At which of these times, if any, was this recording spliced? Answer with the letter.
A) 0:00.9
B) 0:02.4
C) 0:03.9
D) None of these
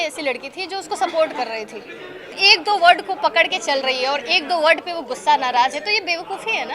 B